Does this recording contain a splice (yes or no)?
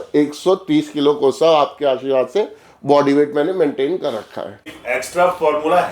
yes